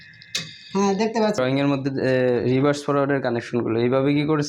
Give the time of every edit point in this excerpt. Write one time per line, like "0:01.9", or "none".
0:01.4